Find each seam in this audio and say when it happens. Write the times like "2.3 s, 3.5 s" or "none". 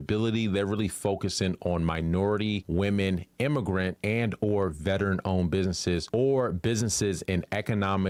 none